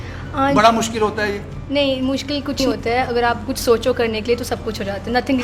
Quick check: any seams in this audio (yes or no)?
yes